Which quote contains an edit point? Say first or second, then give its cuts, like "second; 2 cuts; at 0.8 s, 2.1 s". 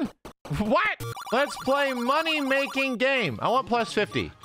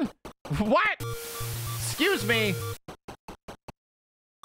first; 1 cut; at 1.1 s